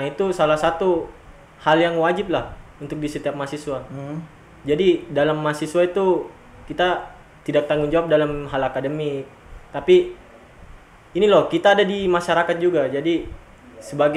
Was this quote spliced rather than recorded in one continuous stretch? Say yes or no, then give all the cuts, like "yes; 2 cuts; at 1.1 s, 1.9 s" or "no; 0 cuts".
no; 0 cuts